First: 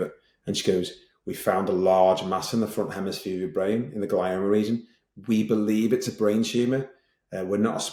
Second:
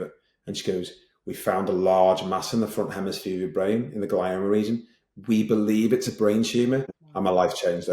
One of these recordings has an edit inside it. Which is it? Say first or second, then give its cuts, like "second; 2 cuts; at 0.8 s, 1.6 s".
second; 1 cut; at 7.0 s